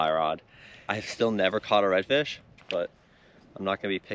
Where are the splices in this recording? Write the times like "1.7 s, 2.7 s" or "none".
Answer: 1.0 s, 2.6 s

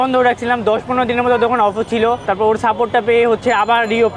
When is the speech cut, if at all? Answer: 2.2 s

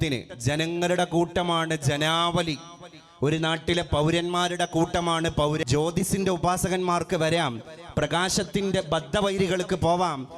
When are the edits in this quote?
5.6 s

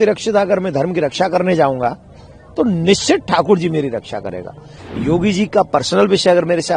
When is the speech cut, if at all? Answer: 4.7 s

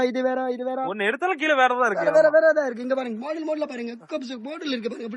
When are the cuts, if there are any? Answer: none

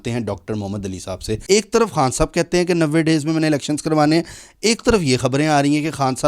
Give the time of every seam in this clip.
1.3 s

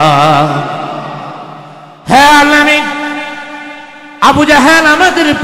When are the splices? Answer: 1.6 s

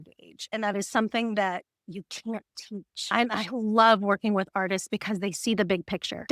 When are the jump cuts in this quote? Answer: 2.9 s

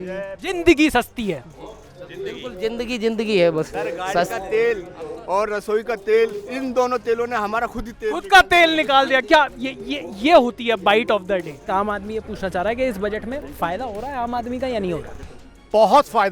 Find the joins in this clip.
11.7 s

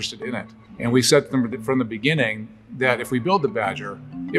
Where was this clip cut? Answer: none

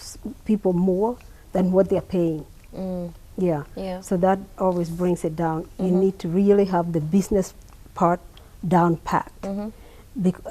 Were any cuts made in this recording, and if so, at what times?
none

